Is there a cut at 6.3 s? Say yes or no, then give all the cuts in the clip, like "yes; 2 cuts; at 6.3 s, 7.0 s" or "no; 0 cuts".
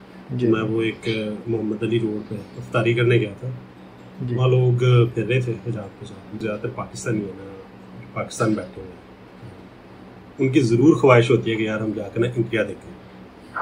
yes; 1 cut; at 6.3 s